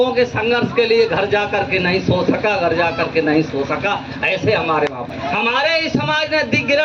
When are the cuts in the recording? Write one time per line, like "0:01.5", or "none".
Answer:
0:05.1